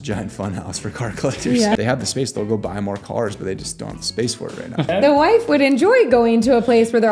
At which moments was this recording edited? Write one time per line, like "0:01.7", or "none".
0:01.8
0:04.9